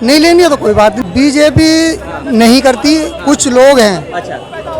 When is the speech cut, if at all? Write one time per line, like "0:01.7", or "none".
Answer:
0:01.0